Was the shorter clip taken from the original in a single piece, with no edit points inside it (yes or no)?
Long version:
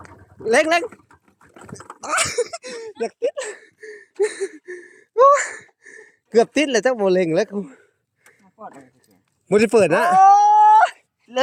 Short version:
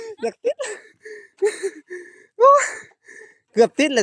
yes